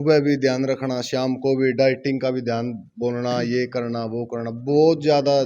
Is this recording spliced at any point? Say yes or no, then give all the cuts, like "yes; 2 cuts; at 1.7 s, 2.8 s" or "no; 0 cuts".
no; 0 cuts